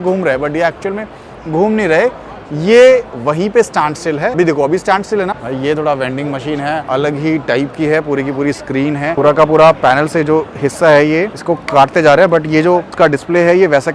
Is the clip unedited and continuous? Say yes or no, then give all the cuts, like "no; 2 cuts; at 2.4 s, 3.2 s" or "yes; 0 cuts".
no; 6 cuts; at 4.3 s, 5.4 s, 6.8 s, 9.2 s, 11.4 s, 12.9 s